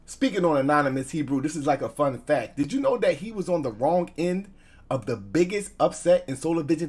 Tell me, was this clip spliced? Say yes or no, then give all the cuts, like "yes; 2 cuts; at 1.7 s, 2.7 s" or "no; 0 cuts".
yes; 1 cut; at 2.7 s